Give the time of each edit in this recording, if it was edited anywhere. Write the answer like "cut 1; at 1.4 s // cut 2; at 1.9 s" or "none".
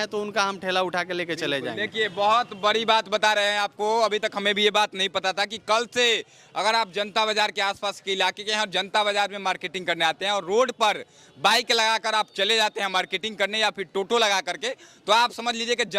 none